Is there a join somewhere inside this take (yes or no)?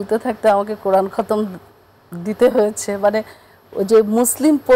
no